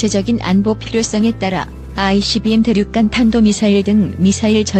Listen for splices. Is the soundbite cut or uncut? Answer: uncut